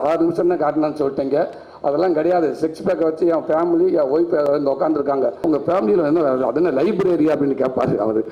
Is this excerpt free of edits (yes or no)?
no